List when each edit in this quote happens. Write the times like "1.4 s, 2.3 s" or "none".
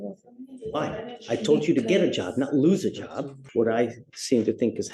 3.4 s